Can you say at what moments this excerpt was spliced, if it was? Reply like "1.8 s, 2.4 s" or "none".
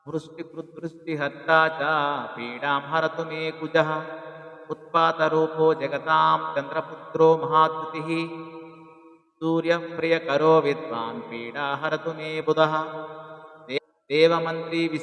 none

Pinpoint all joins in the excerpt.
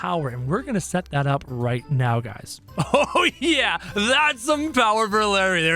2.5 s

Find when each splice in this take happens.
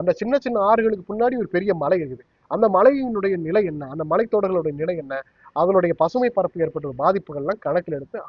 none

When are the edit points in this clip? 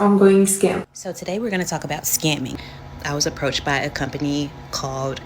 1.0 s

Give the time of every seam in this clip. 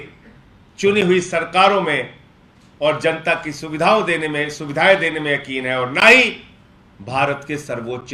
none

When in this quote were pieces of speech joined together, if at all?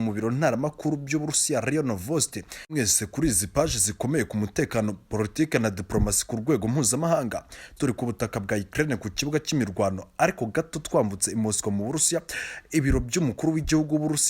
2.7 s

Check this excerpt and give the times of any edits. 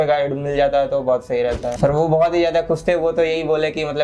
1.7 s

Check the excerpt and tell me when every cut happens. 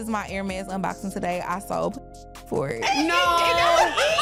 none

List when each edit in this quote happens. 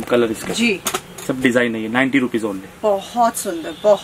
none

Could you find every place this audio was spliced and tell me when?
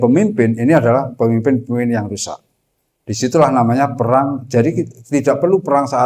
none

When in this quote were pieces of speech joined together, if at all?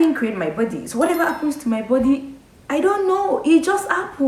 none

